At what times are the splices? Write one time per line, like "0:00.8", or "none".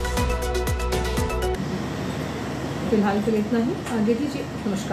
none